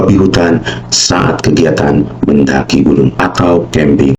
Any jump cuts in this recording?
yes; 1 cut; at 3.2 s

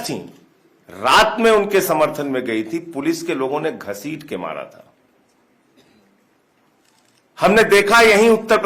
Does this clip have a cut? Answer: no; 0 cuts

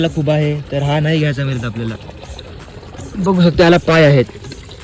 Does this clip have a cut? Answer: no; 0 cuts

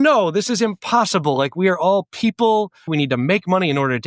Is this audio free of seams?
no; 1 cut; at 2.9 s

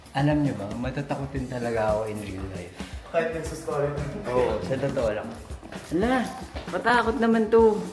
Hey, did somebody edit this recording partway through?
no; 0 cuts

